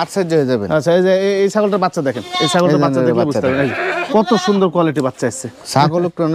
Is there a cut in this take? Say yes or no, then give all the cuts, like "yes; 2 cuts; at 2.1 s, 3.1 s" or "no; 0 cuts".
no; 0 cuts